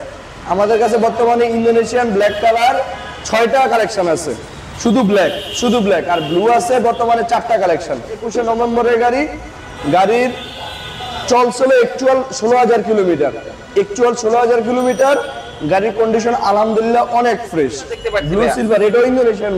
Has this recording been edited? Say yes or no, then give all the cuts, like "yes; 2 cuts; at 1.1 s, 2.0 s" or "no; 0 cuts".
yes; 2 cuts; at 8.3 s, 18.0 s